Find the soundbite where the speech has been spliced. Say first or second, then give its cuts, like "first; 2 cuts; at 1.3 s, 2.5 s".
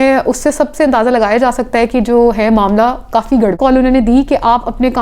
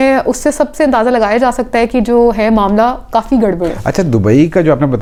first; 1 cut; at 3.6 s